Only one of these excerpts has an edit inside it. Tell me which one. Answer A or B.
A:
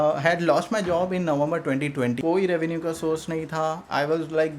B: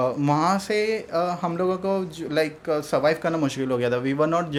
A